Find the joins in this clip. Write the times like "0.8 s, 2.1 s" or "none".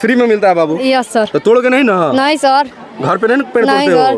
none